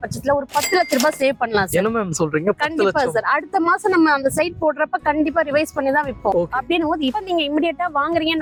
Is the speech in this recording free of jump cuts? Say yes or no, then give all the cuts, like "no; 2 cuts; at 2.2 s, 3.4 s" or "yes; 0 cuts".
yes; 0 cuts